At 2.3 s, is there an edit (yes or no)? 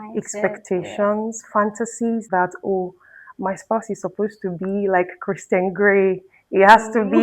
yes